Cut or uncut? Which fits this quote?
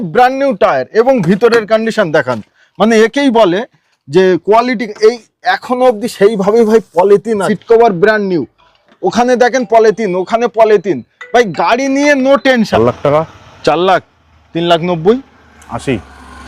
cut